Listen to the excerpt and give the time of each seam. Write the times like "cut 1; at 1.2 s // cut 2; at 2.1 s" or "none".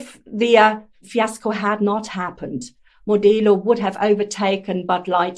cut 1; at 0.9 s